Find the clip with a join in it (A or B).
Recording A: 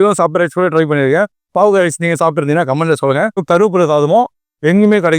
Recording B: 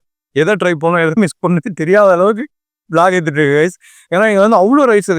A